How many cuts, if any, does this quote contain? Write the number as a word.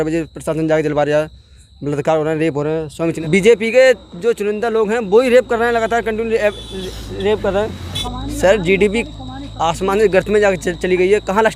two